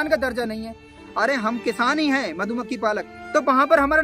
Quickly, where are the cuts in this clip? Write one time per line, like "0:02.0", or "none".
0:03.1